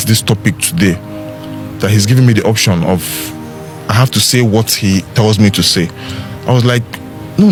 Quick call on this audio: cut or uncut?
uncut